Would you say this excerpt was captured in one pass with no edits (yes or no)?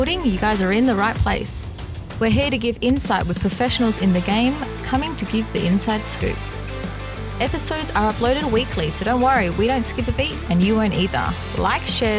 yes